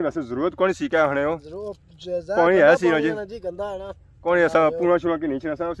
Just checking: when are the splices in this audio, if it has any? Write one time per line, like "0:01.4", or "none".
none